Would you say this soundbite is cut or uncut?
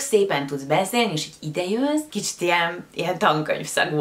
cut